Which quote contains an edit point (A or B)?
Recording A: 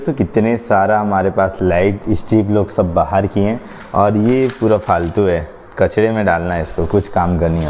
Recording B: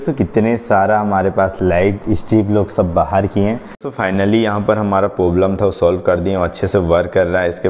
B